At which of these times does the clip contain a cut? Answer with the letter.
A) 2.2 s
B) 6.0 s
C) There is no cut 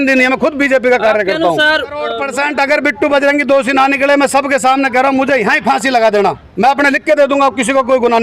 A